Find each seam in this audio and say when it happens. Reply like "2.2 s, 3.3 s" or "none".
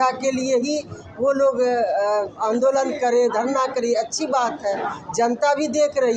none